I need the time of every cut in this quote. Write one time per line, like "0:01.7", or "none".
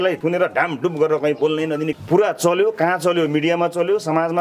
0:01.9